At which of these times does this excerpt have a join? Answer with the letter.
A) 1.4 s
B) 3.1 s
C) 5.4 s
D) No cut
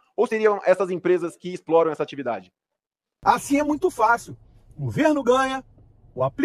B